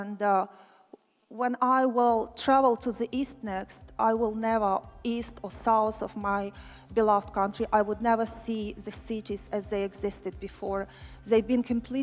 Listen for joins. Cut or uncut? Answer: uncut